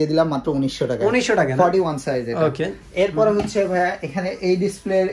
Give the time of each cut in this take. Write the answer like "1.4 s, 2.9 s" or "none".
none